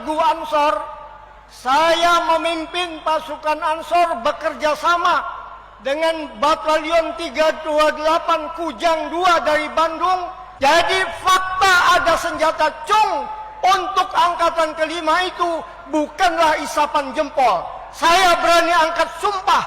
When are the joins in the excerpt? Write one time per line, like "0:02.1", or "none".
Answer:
0:10.4